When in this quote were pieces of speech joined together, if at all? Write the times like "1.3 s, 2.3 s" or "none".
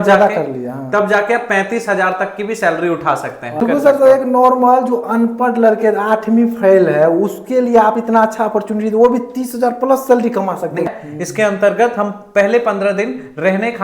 3.6 s, 10.9 s